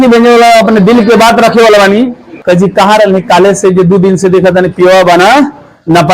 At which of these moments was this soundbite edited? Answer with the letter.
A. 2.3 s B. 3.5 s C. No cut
A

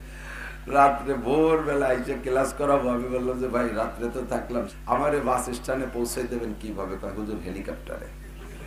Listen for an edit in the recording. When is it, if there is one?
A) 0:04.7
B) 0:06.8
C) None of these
A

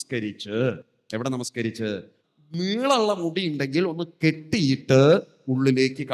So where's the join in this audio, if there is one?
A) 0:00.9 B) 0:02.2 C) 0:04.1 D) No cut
B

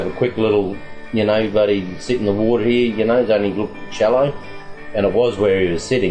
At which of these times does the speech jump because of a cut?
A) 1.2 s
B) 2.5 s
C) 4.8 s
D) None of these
D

